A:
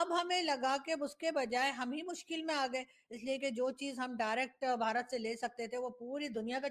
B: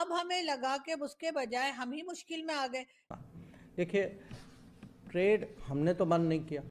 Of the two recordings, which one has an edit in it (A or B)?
B